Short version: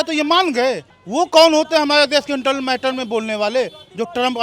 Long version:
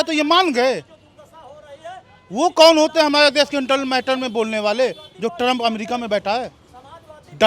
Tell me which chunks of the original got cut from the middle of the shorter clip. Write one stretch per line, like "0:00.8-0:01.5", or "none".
0:00.9-0:02.2